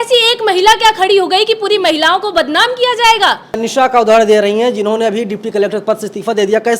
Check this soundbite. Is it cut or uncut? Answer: uncut